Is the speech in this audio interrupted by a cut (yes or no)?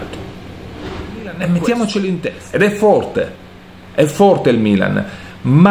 yes